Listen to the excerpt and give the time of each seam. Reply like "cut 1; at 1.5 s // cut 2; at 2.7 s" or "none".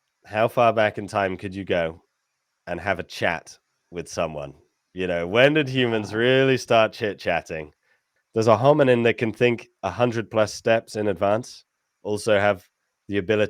cut 1; at 8.0 s